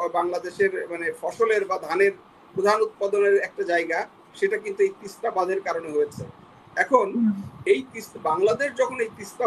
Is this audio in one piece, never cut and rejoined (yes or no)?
yes